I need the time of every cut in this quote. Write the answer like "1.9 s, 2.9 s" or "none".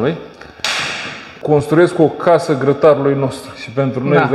1.3 s